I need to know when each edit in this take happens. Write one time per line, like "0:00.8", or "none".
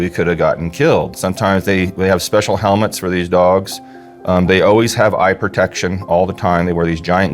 0:01.2